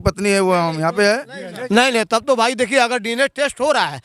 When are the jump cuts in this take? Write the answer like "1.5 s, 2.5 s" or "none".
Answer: 1.5 s